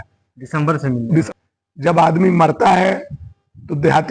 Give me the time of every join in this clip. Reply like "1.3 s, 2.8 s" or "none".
1.3 s